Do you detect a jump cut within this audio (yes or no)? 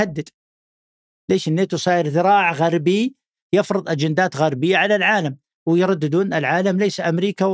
no